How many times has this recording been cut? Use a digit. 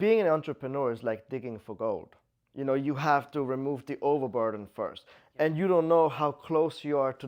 0